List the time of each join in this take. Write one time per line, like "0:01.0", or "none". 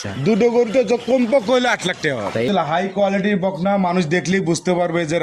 0:02.5